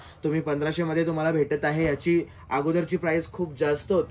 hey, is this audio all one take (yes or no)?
yes